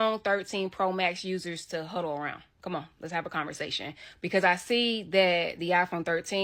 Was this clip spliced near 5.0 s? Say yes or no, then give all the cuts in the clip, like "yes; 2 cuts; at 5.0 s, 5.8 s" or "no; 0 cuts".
no; 0 cuts